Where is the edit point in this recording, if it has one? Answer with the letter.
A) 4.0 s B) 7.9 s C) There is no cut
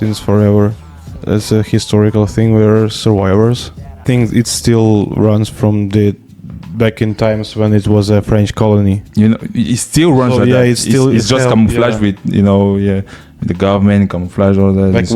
A